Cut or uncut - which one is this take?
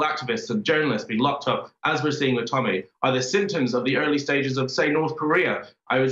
uncut